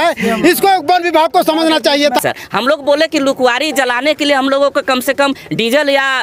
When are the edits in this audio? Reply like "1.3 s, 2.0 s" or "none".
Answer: 2.2 s